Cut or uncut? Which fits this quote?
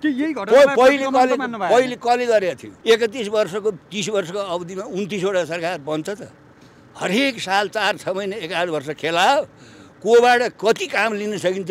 cut